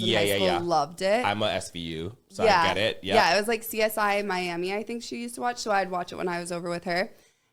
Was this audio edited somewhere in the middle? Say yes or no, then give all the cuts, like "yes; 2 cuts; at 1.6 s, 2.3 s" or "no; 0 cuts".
no; 0 cuts